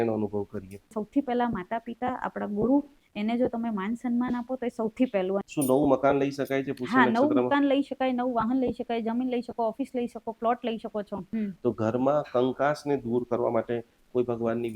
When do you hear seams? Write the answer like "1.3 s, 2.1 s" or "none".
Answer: 0.9 s, 5.5 s, 11.2 s